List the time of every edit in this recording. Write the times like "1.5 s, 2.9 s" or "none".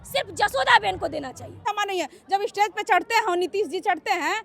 1.6 s